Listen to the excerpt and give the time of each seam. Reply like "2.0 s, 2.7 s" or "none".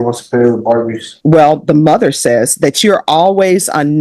1.1 s